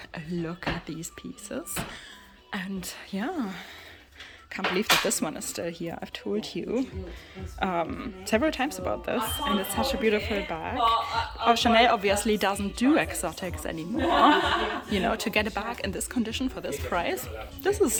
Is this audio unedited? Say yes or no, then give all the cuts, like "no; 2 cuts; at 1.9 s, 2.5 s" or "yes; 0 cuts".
yes; 0 cuts